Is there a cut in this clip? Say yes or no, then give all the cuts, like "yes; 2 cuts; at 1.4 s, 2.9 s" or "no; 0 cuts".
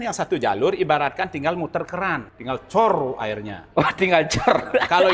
yes; 1 cut; at 2.3 s